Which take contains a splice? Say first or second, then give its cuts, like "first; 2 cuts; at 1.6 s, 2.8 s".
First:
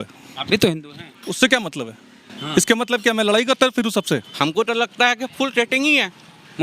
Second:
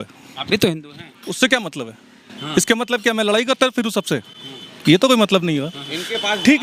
first; 1 cut; at 4.3 s